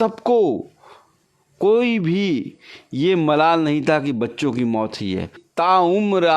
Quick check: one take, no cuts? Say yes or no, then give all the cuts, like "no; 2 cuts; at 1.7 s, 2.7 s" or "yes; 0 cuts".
no; 1 cut; at 5.4 s